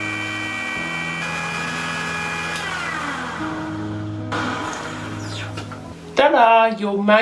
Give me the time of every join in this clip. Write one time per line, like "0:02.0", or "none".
0:05.9